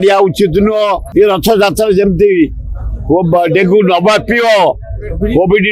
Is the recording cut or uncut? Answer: cut